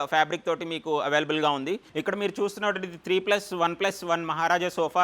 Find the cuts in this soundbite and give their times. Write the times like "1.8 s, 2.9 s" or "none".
1.9 s